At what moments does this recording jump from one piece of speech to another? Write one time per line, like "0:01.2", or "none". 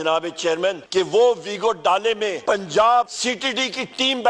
0:00.8
0:02.4
0:03.2